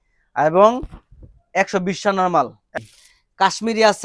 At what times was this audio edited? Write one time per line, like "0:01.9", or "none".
0:02.6